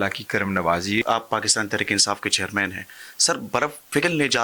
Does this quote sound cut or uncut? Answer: cut